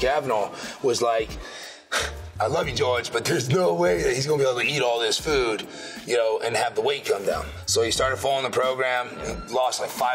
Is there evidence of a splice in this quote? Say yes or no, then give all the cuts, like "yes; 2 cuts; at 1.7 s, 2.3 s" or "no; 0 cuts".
no; 0 cuts